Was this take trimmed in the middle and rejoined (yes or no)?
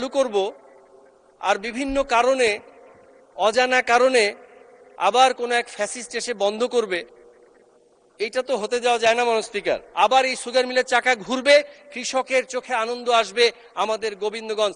yes